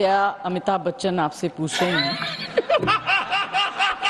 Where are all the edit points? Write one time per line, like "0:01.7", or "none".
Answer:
none